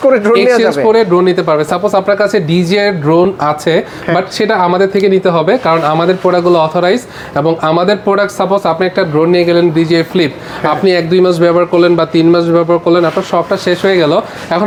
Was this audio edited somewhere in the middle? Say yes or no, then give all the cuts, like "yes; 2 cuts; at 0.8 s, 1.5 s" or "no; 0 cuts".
no; 0 cuts